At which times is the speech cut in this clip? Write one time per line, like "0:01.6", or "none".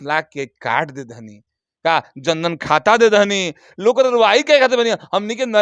none